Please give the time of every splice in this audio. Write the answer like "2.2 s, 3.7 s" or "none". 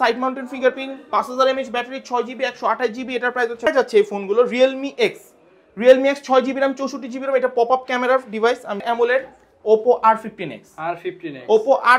3.7 s, 8.8 s